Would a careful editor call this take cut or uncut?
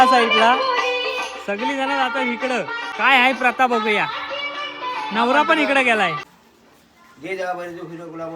cut